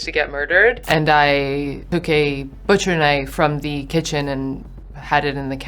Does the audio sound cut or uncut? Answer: cut